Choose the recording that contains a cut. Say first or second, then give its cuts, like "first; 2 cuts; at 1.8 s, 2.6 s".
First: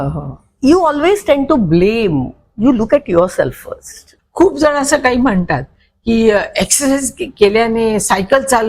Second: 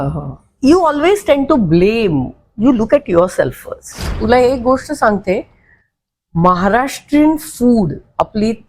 second; 1 cut; at 4.2 s